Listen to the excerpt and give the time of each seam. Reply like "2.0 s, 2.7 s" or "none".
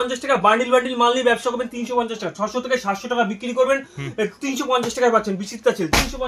none